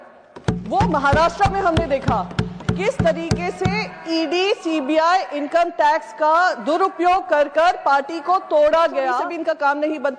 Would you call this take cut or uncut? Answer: cut